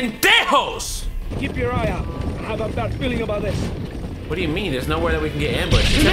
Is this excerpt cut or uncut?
cut